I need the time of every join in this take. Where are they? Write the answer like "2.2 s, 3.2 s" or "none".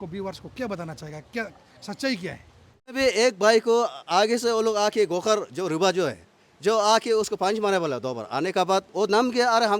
3.0 s